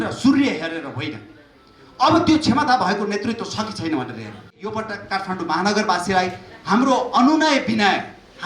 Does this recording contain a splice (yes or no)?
yes